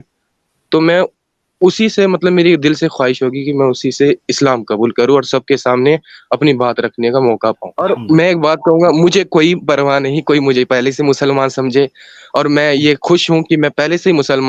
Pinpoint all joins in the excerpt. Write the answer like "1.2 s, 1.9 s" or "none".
7.7 s